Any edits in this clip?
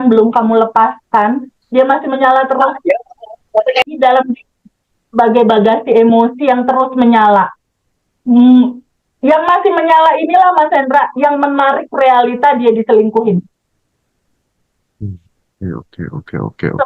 no; 0 cuts

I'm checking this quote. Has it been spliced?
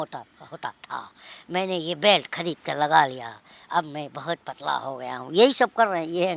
no; 0 cuts

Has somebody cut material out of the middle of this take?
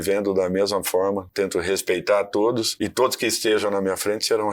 yes; 2 cuts; at 1.3 s, 2.7 s

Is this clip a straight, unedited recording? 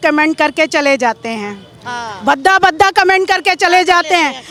yes; 0 cuts

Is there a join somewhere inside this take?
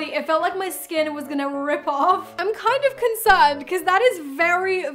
yes; 1 cut; at 2.3 s

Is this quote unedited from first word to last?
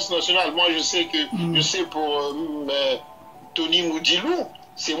no; 1 cut; at 3.2 s

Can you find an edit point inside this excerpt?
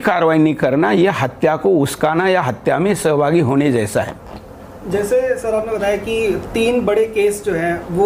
no; 0 cuts

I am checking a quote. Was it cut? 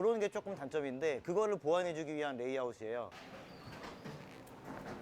yes; 1 cut; at 3.2 s

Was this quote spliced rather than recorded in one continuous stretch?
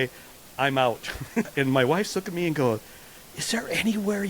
yes; 1 cut; at 1.5 s

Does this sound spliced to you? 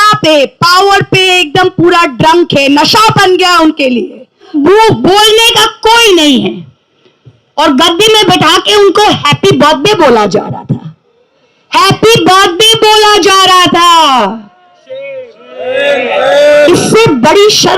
yes; 1 cut; at 4.5 s

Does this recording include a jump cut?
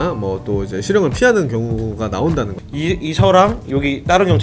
yes; 1 cut; at 2.6 s

